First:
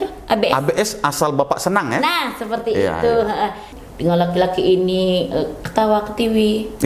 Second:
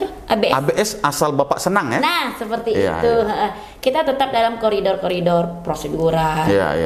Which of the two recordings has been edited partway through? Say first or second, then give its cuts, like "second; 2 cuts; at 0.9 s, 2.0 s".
first; 1 cut; at 3.7 s